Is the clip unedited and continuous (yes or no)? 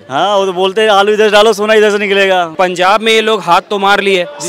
no